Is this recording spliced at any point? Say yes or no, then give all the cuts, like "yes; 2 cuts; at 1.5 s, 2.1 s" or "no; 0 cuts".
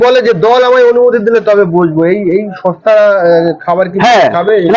no; 0 cuts